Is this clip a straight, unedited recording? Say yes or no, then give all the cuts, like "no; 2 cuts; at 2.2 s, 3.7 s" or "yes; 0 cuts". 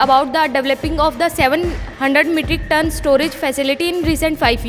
yes; 0 cuts